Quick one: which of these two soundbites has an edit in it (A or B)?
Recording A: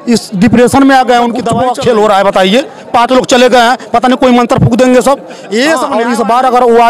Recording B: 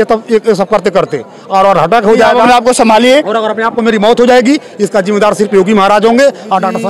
A